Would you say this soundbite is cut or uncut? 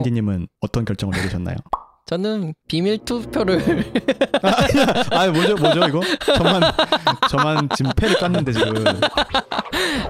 uncut